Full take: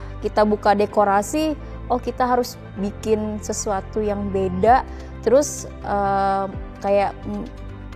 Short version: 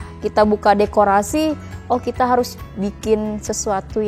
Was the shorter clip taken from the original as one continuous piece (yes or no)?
yes